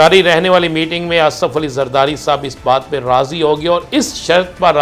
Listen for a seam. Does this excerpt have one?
no; 0 cuts

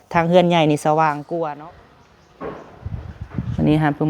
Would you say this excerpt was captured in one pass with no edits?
no; 1 cut; at 1.5 s

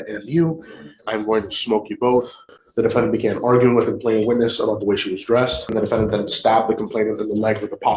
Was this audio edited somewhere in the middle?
yes; 2 cuts; at 2.6 s, 5.7 s

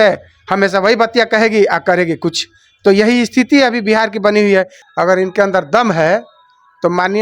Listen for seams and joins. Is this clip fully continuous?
no; 1 cut; at 4.8 s

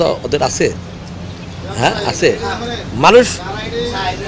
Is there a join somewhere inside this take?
no; 0 cuts

